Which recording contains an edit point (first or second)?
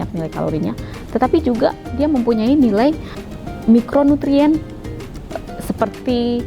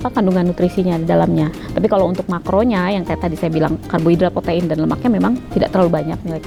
first